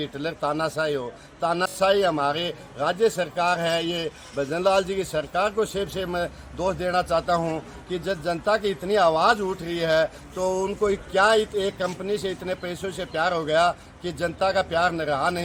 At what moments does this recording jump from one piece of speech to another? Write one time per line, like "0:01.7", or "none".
none